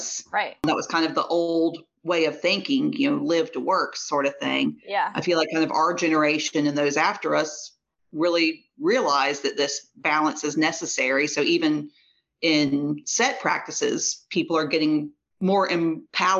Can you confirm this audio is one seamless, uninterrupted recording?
yes; 0 cuts

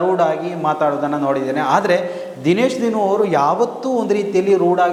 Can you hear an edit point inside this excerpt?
no; 0 cuts

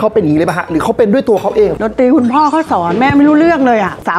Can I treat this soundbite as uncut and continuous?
no; 1 cut; at 1.7 s

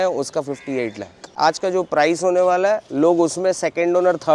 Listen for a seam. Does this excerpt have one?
yes; 1 cut; at 1.3 s

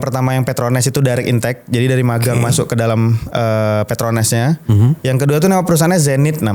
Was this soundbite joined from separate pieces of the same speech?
no; 0 cuts

